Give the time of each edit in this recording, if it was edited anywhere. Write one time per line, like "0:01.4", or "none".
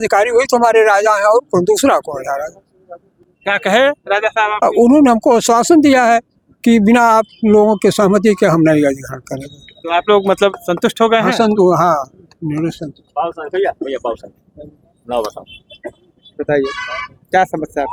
none